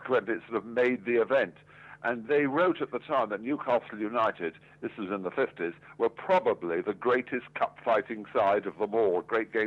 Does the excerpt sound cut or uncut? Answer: uncut